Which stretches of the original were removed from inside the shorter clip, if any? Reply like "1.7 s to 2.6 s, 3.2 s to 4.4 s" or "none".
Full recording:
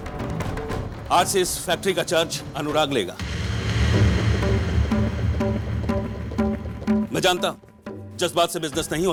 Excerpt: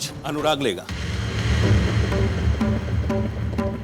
none